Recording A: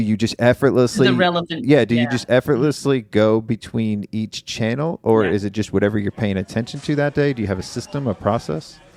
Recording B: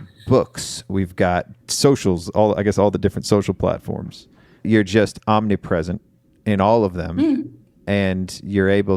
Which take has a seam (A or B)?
B